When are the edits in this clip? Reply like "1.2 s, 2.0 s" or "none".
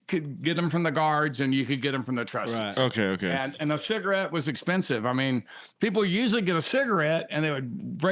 none

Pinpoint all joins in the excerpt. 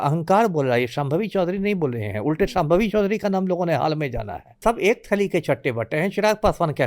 4.5 s

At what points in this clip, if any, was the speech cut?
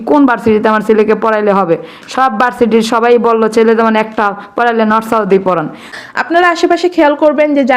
5.9 s

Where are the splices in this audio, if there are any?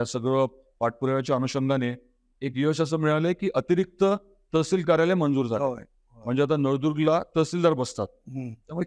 none

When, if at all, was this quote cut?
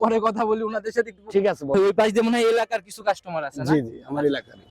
1.7 s

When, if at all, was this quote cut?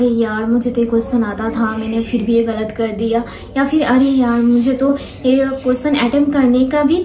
none

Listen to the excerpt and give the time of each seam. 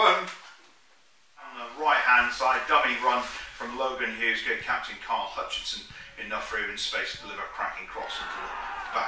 1.7 s

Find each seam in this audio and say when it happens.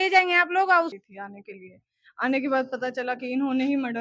0.9 s

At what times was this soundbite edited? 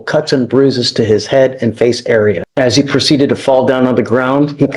2.5 s

